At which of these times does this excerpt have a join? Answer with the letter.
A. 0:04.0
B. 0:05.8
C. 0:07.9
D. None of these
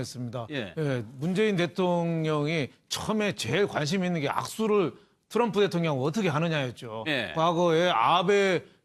A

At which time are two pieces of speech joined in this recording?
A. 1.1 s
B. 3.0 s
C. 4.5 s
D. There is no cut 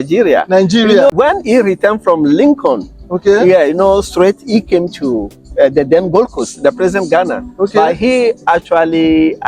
A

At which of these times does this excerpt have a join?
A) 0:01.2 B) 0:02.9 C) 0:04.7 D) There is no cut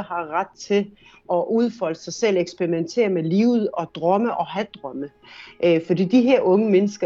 A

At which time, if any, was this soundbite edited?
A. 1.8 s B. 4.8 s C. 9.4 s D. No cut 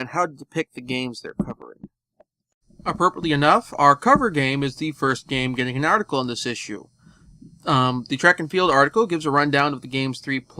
B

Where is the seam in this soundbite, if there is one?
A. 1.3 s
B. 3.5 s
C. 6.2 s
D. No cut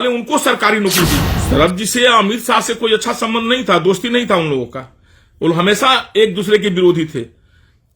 A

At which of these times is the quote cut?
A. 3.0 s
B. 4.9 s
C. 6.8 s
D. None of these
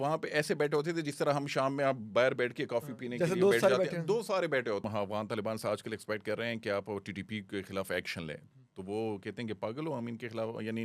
B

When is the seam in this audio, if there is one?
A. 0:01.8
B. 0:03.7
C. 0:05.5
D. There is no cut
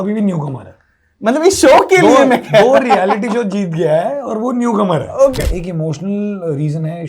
C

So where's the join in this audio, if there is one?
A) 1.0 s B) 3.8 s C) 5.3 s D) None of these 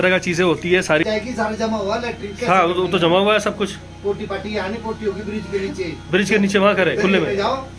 A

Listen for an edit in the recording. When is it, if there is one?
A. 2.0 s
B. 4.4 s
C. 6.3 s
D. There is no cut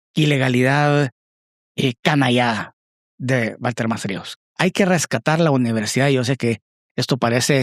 B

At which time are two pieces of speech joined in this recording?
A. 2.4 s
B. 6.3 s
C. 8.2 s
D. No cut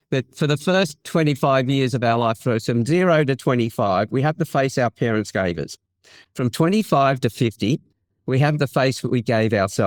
D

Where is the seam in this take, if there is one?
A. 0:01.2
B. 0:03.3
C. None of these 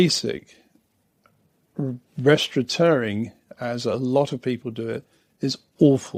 C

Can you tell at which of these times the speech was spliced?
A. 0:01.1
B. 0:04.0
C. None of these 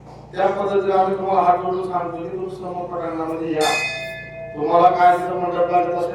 C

